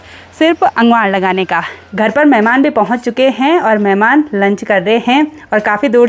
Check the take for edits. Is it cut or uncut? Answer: cut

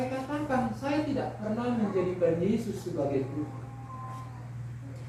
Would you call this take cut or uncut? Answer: uncut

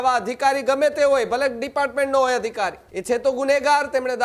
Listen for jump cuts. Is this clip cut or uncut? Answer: cut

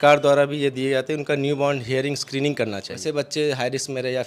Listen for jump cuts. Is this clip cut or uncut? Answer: cut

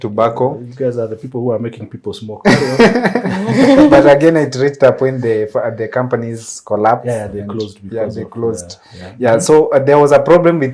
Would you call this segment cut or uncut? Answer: uncut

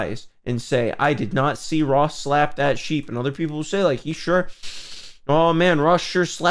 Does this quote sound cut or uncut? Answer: uncut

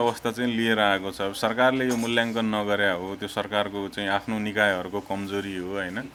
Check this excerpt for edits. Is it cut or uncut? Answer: uncut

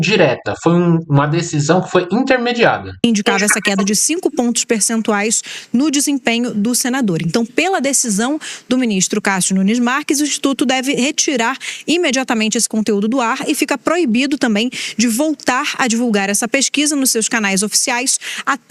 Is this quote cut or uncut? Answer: uncut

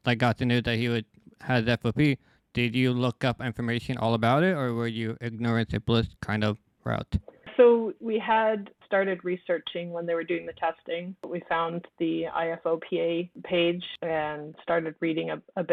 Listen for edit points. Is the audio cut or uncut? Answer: uncut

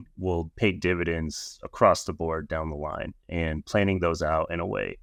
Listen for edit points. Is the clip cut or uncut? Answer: uncut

